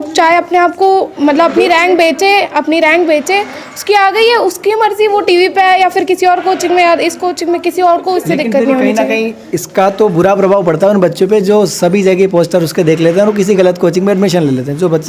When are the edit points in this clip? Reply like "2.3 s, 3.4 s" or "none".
none